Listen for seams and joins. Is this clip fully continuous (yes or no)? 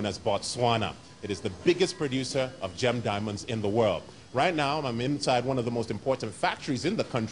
no